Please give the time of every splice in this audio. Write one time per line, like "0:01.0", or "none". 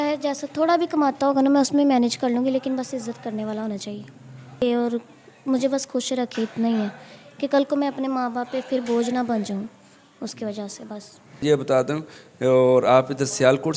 0:04.6
0:11.4

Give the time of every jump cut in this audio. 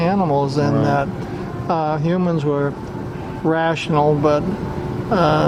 none

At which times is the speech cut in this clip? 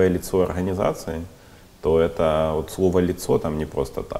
none

